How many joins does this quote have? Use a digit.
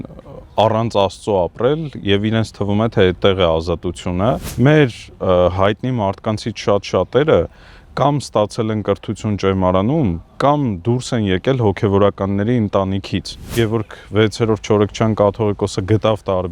2